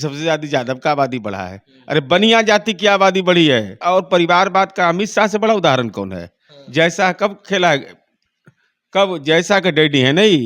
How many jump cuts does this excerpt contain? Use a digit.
1